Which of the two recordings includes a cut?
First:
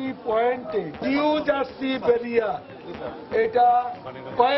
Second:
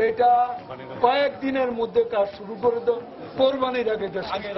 first; 1 cut; at 1.0 s

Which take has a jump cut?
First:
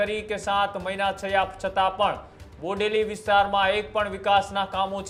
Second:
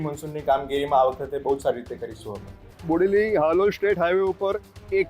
second; 1 cut; at 2.7 s

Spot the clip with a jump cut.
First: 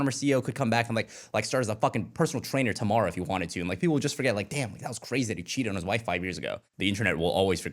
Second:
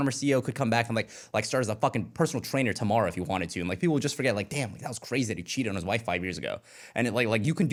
first; 1 cut; at 6.6 s

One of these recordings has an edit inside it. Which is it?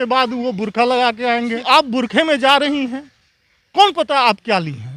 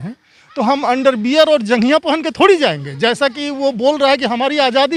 first; 1 cut; at 1.6 s

